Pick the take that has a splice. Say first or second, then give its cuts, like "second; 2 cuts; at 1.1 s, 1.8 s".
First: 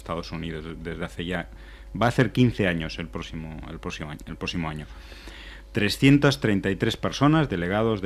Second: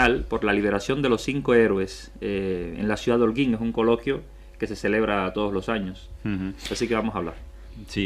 second; 1 cut; at 3.1 s